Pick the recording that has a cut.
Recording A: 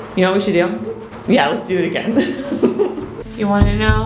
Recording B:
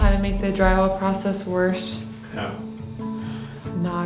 A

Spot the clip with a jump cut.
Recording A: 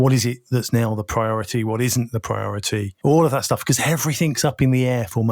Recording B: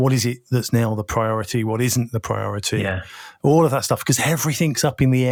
A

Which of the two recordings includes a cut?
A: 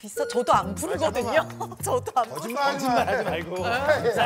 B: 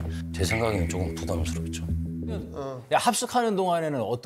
B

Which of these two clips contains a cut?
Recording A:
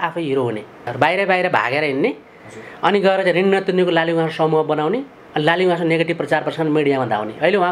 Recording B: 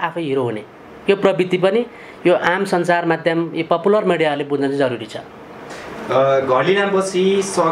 A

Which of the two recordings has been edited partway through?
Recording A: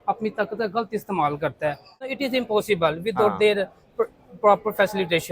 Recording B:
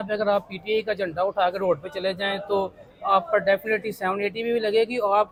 A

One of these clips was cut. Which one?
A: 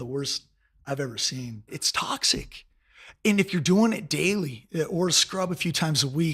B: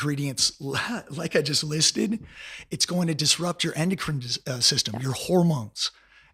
A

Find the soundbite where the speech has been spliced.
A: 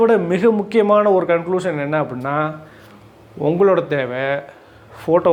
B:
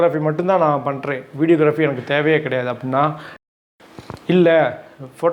B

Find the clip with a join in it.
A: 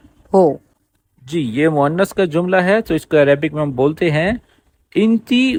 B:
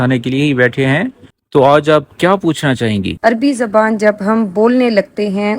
B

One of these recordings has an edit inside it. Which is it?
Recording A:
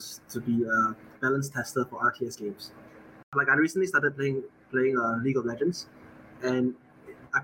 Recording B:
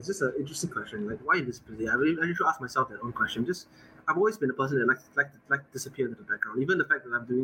A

